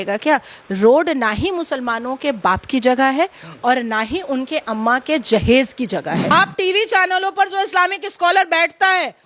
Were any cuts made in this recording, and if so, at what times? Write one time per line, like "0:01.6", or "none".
0:06.3

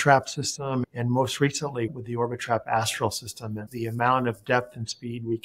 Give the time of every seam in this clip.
0:00.8
0:01.9
0:03.6

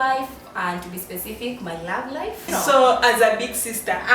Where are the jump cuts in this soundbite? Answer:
0:02.4

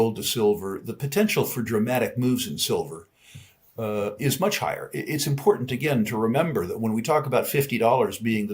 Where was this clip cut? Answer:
none

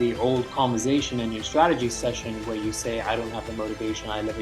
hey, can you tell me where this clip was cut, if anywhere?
none

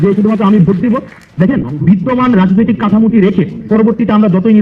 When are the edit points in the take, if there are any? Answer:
none

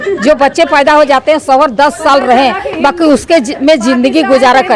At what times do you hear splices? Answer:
none

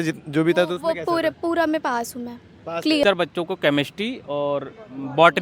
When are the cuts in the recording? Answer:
0:03.0

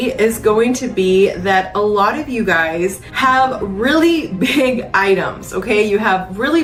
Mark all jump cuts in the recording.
none

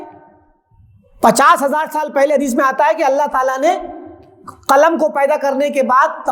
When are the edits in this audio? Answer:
none

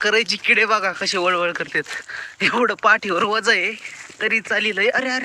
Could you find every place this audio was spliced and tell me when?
none

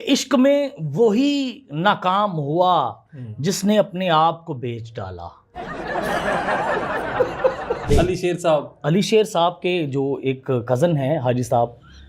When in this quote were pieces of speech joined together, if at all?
0:07.9

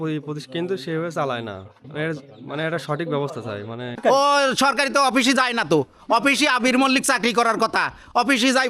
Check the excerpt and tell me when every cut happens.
0:03.9

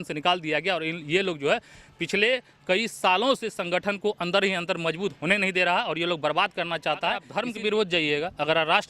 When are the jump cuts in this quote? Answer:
0:07.3

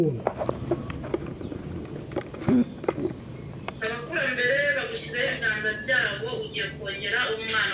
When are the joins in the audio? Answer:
none

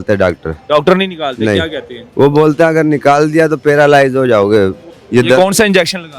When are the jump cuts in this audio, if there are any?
0:04.9

